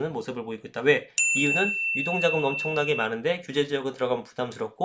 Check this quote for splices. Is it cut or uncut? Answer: uncut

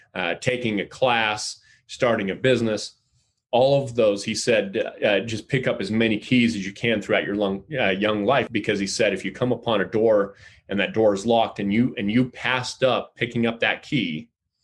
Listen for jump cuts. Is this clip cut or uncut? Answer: cut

